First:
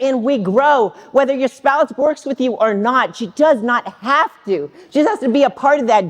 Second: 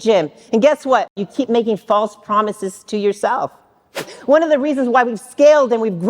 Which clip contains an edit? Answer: second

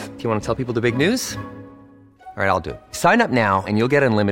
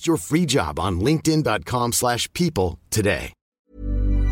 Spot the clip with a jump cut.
second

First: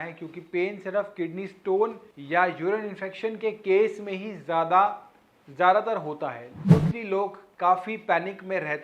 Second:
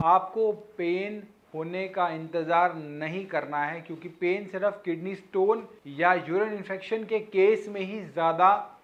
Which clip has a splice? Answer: first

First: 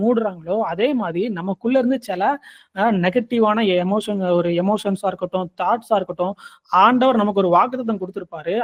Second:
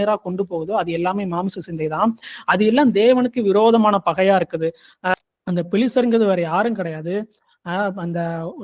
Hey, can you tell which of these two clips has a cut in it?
second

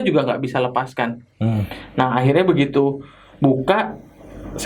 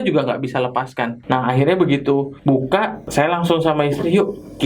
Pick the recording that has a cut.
second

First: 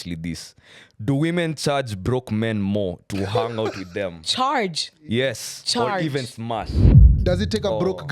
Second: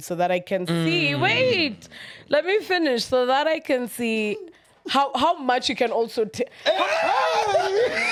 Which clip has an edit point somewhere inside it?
first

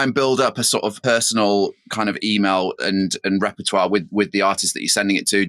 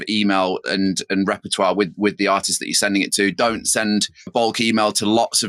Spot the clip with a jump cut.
first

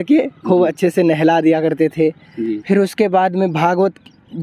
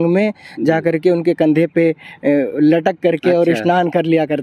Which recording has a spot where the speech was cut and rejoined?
first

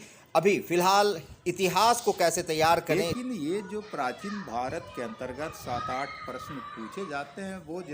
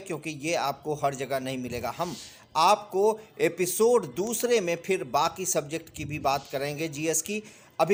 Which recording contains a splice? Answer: first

